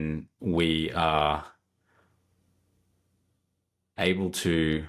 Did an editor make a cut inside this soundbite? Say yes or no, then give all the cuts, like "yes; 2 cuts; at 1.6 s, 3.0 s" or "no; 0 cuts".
no; 0 cuts